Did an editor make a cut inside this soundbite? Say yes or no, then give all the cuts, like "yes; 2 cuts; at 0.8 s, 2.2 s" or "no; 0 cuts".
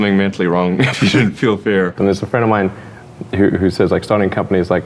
yes; 1 cut; at 1.9 s